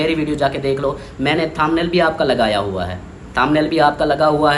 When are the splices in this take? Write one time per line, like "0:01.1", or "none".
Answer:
none